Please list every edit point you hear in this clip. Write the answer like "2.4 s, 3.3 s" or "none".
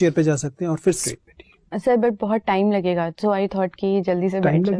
1.0 s